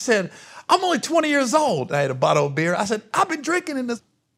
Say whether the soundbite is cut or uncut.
uncut